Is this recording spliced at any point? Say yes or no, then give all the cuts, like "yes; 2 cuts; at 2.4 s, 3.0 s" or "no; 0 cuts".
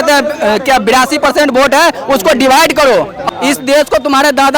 yes; 1 cut; at 3.2 s